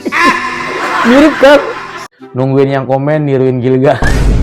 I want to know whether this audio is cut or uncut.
cut